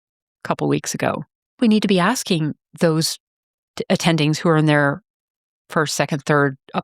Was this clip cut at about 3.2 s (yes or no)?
no